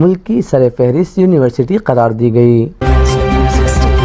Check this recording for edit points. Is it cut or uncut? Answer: cut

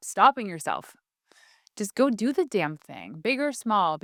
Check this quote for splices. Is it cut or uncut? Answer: uncut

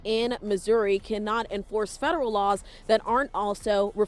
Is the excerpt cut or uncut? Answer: uncut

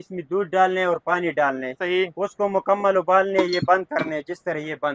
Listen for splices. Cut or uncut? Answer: uncut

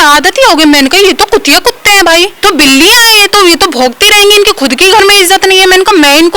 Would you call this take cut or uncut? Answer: cut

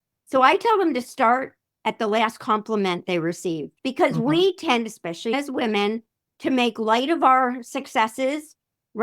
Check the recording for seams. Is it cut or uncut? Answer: cut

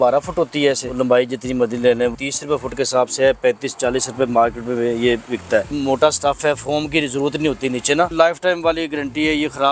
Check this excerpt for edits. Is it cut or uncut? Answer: cut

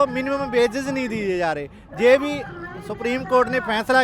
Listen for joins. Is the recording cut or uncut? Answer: uncut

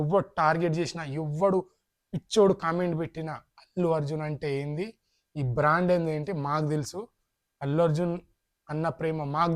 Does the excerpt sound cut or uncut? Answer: uncut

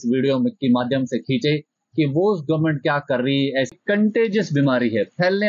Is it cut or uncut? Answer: cut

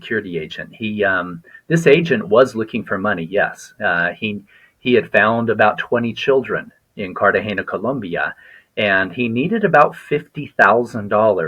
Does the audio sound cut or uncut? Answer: uncut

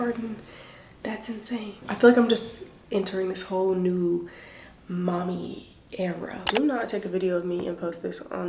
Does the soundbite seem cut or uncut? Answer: cut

